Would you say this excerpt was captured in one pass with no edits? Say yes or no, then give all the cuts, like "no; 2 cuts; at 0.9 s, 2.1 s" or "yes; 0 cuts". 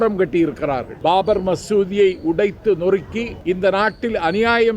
no; 2 cuts; at 0.9 s, 3.3 s